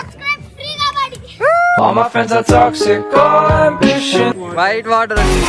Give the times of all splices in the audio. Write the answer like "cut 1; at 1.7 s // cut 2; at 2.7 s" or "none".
cut 1; at 4.4 s